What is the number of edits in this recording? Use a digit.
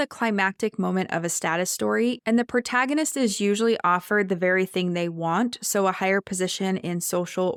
0